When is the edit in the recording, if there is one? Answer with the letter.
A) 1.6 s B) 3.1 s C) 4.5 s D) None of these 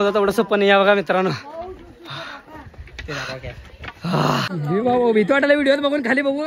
C